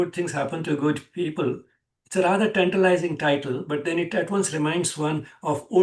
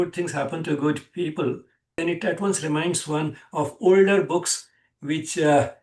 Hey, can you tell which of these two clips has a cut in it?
second; 1 cut; at 2.0 s

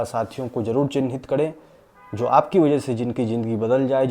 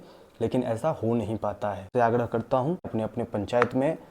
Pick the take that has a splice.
second; 2 cuts; at 1.9 s, 2.9 s

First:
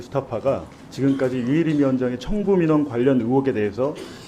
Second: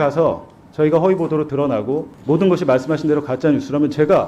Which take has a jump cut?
second; 1 cut; at 2.1 s

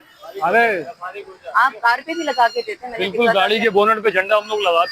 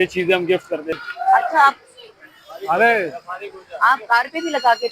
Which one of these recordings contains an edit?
second; 1 cut; at 1.0 s

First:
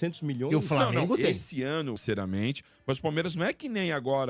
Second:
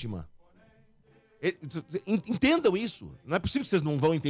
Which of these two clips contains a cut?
first; 1 cut; at 2.0 s

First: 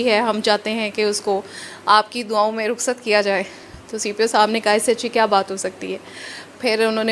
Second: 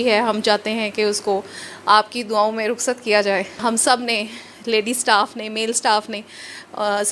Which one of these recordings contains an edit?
second; 1 cut; at 3.6 s

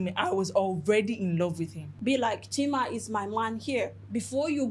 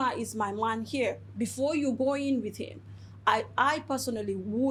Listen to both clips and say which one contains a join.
first; 1 cut; at 1.8 s

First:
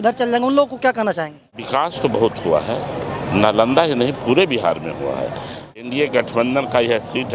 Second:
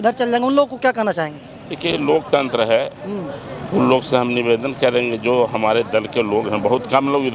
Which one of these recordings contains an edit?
first; 2 cuts; at 1.6 s, 5.9 s

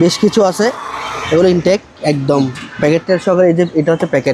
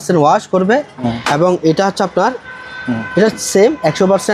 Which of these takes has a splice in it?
second; 1 cut; at 1.0 s

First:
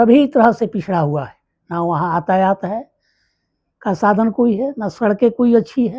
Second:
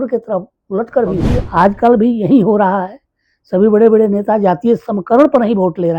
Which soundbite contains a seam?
second; 1 cut; at 1.3 s

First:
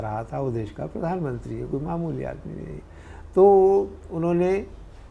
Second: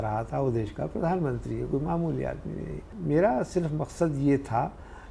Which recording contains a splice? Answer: second; 1 cut; at 2.9 s

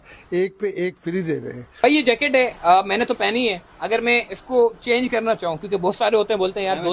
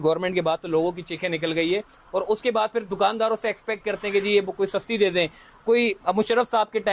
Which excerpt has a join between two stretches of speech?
first; 1 cut; at 1.8 s

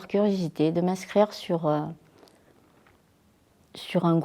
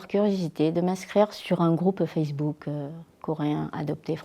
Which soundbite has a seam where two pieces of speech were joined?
second; 1 cut; at 1.4 s

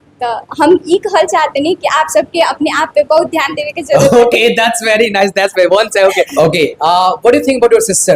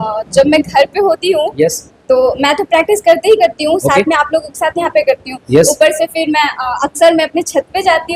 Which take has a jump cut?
first; 1 cut; at 6.3 s

